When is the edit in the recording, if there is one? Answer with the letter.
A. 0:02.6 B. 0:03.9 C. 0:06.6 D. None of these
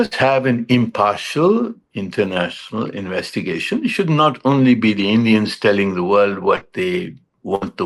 D